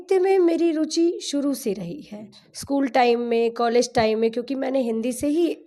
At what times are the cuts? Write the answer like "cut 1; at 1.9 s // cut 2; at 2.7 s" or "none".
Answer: none